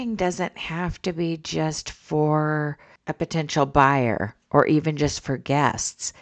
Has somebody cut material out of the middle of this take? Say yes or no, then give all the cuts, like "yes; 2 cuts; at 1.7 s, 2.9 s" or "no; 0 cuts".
no; 0 cuts